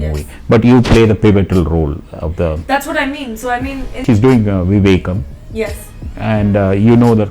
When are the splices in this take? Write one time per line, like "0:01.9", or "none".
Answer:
0:04.0